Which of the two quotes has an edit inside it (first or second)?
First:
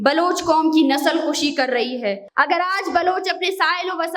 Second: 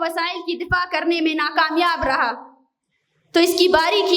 first